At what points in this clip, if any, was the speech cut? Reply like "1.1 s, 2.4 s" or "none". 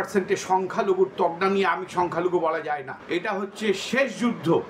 2.9 s